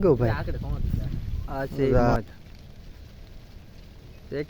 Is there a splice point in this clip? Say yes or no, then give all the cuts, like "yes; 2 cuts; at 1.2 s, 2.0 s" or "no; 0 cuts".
yes; 1 cut; at 2.2 s